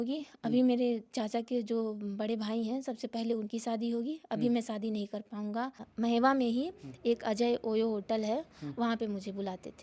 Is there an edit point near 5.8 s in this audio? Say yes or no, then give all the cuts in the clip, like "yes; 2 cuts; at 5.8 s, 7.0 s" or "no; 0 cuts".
yes; 1 cut; at 5.8 s